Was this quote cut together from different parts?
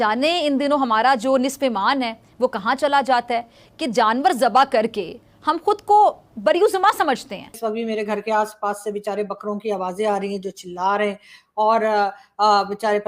yes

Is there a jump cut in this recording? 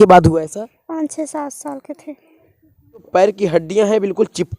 yes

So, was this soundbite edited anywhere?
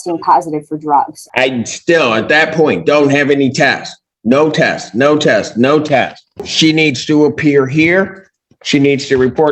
yes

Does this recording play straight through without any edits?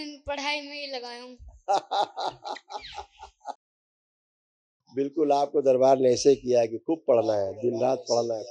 yes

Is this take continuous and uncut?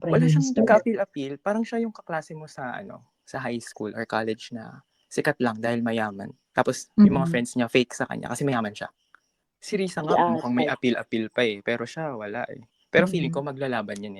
no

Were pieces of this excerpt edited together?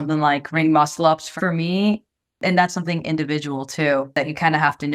yes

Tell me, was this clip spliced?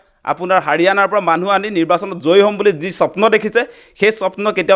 no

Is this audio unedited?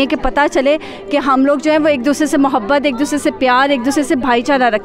yes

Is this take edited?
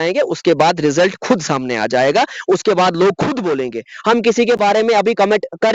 no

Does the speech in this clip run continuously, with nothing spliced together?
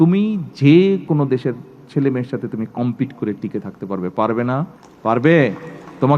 no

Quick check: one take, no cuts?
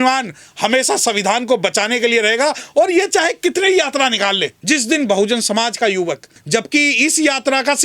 no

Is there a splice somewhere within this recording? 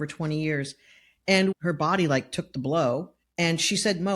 yes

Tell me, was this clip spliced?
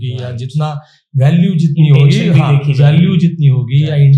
no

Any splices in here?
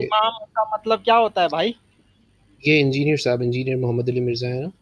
no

